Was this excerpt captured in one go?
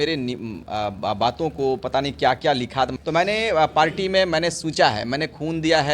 no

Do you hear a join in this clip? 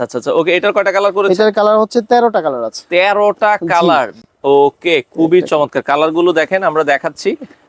no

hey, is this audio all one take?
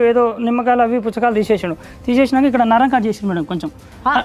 yes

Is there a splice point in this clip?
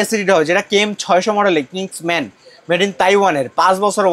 no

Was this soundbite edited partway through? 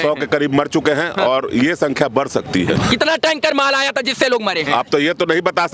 yes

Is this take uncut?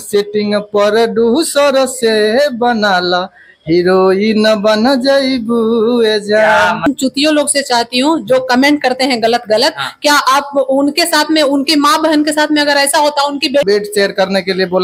no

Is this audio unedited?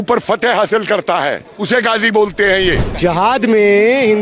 no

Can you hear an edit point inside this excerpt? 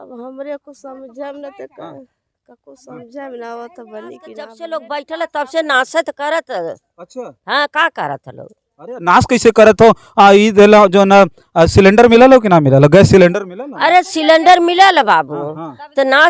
yes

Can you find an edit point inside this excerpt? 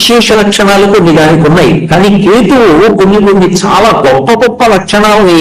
no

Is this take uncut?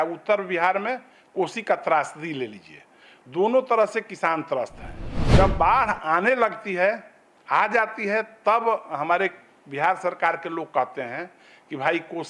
yes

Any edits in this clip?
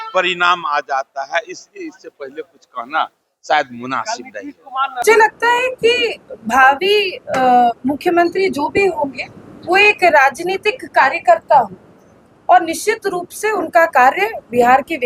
yes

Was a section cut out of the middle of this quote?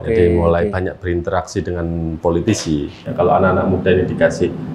yes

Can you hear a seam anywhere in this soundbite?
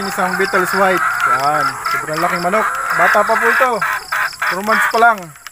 no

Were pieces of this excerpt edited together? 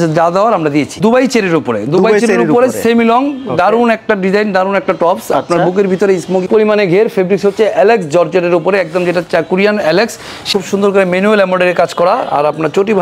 yes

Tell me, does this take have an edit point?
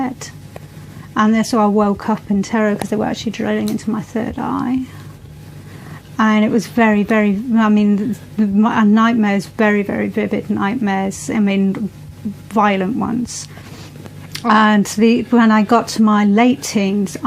yes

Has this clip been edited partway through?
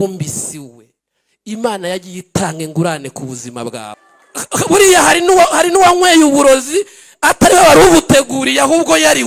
yes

